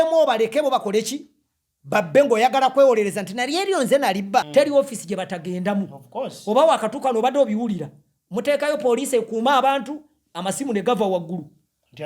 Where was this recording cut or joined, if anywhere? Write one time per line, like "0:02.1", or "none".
0:04.5